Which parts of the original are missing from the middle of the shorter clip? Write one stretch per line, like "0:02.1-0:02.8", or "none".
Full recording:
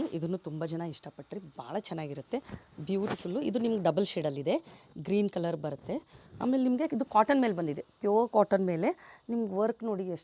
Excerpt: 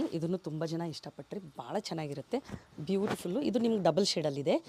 none